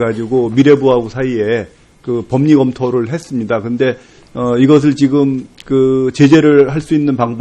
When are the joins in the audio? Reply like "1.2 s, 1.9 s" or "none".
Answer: 5.2 s